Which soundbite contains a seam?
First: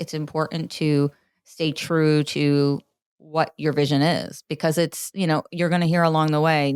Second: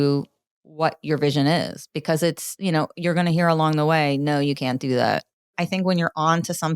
second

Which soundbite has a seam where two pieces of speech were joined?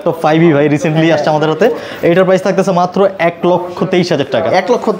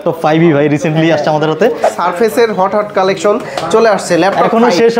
second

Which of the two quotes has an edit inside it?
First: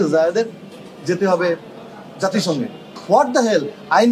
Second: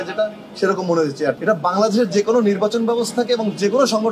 second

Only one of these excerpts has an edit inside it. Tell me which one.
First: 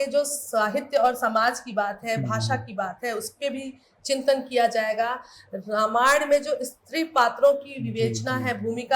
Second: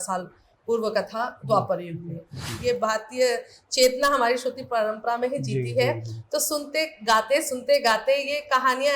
second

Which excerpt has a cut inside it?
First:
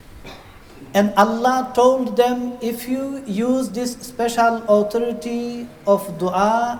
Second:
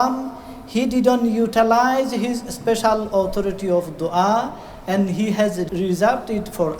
second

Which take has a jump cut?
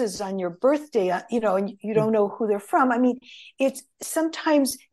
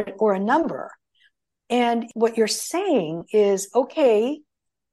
second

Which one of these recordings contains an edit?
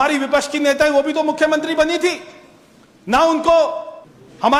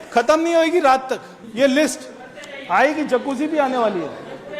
second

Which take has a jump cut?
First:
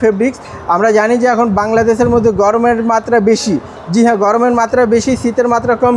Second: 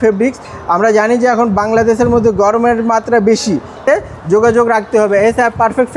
second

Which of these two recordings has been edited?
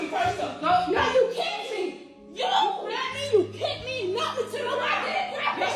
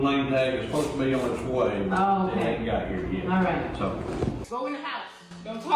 second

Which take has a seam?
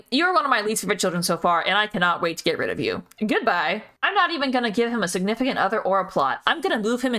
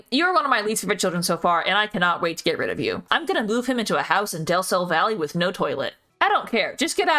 second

